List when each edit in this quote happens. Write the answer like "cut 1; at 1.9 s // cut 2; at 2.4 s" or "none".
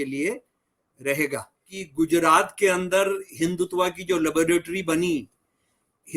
cut 1; at 1.8 s